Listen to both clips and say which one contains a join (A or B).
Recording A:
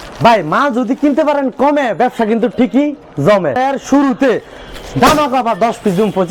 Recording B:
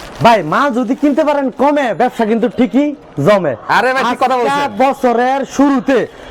A